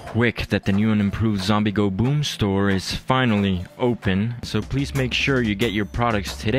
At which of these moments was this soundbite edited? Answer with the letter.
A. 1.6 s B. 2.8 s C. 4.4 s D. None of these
C